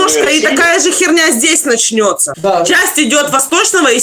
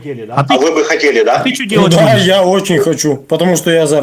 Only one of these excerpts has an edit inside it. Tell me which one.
first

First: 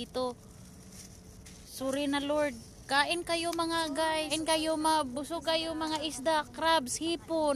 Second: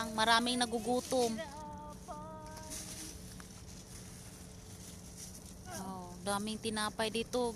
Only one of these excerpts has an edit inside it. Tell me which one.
first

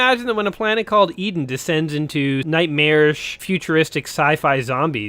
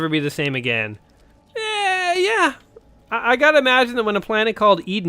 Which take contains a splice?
first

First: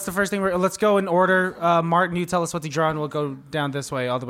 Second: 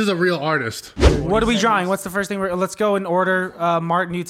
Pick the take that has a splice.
second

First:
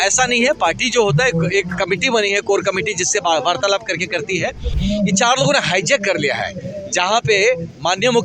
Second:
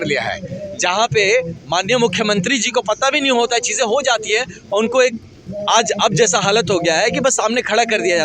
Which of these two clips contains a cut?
first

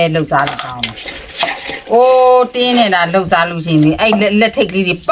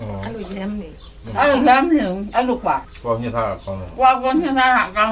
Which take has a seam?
second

